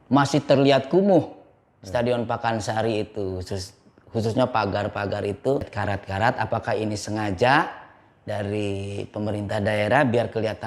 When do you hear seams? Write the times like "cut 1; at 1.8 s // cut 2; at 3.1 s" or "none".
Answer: cut 1; at 5.7 s